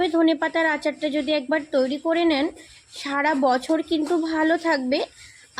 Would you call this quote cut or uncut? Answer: uncut